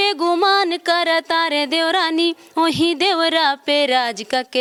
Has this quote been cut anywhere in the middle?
no; 0 cuts

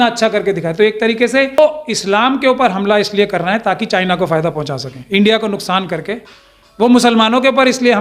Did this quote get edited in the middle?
yes; 1 cut; at 1.6 s

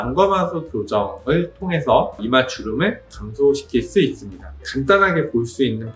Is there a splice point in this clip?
yes; 1 cut; at 4.6 s

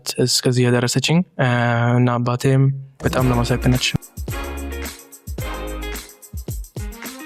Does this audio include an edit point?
no; 0 cuts

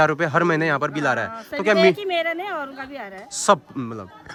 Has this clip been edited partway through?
no; 0 cuts

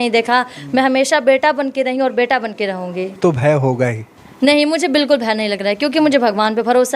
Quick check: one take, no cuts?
no; 1 cut; at 3.2 s

